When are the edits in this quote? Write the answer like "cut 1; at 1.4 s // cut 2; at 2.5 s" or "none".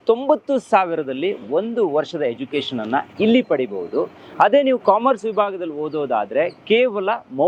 none